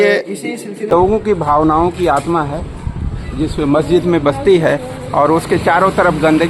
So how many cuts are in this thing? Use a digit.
1